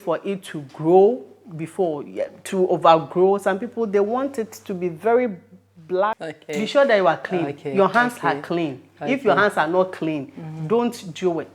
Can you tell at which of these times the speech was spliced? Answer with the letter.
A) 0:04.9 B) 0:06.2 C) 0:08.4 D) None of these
B